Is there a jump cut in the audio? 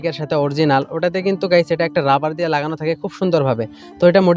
no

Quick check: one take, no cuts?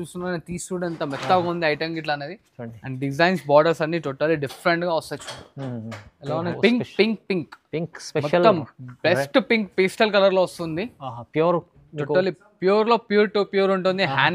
no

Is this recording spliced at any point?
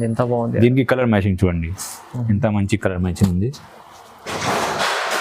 no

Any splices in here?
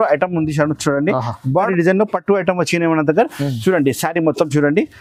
yes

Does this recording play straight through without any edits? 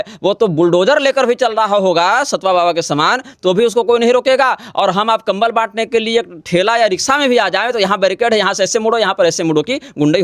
yes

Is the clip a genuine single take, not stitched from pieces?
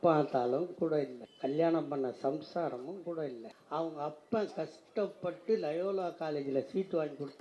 no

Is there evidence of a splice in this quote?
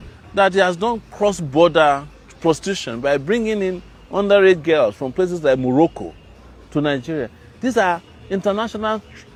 no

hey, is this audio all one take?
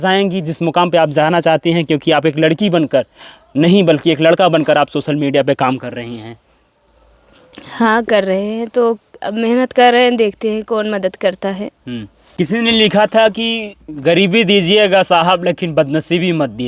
no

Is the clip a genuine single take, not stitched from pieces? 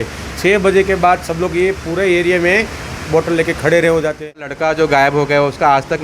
no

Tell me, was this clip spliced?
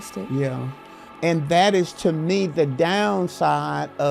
yes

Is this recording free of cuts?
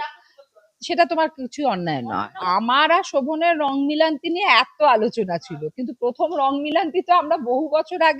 no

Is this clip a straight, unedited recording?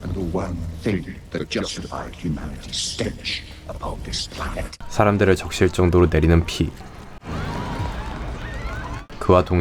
no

